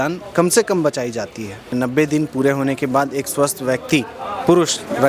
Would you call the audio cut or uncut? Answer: cut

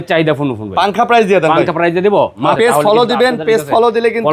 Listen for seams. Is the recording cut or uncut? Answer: cut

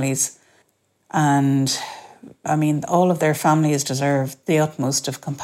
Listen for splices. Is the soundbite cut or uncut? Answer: cut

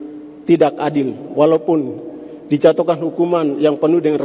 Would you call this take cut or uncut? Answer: uncut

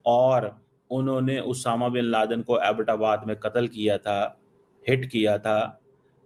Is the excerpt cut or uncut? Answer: uncut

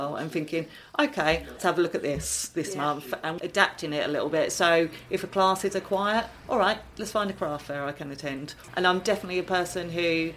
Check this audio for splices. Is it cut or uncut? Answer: cut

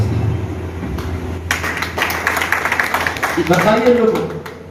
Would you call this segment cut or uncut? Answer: uncut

